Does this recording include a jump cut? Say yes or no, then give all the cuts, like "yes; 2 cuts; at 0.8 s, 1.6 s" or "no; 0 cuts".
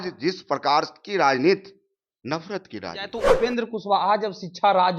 yes; 1 cut; at 3.4 s